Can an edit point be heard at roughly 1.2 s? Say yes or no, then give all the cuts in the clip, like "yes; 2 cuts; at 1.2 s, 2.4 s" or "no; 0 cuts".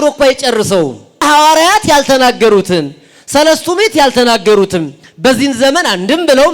yes; 1 cut; at 1.2 s